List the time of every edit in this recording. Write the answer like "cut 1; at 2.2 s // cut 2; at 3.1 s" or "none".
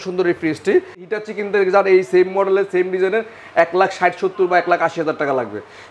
cut 1; at 1.1 s